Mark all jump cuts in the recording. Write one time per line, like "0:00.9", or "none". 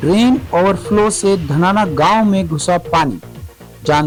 none